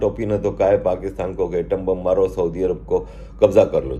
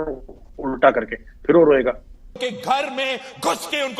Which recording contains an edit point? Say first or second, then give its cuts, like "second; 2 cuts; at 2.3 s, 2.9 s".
second; 1 cut; at 2.4 s